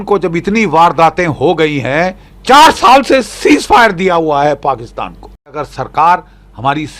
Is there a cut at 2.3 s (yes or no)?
yes